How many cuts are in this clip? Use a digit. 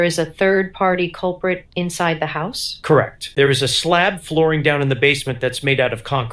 1